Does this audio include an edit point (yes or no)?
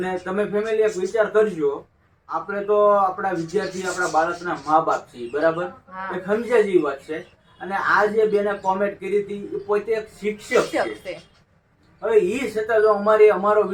no